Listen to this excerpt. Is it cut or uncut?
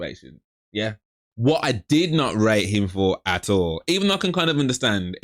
cut